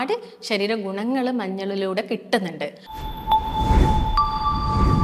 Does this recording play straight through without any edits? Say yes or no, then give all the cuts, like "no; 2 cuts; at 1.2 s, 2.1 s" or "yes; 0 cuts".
no; 1 cut; at 2.9 s